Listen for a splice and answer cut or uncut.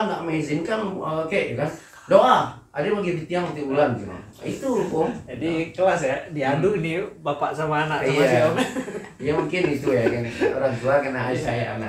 uncut